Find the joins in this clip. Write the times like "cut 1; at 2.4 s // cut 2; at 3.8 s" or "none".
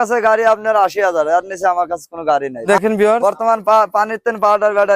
cut 1; at 2.7 s

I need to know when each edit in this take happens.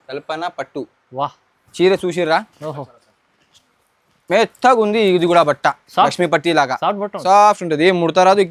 none

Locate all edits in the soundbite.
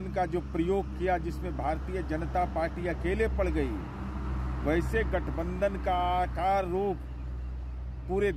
none

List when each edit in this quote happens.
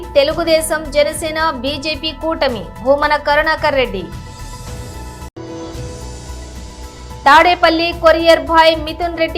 cut 1; at 4.1 s // cut 2; at 5.3 s // cut 3; at 7.2 s

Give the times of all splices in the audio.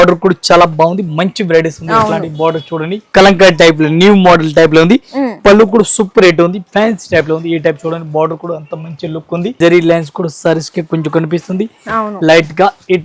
cut 1; at 3.0 s // cut 2; at 9.5 s

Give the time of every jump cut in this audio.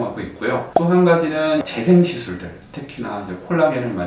cut 1; at 1.7 s

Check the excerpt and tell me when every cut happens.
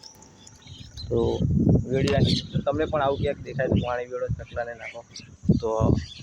none

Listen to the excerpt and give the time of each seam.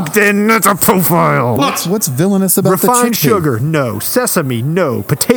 cut 1; at 1.6 s

